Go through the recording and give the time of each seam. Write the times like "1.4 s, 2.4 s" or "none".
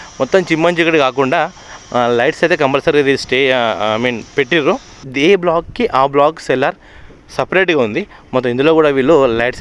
5.0 s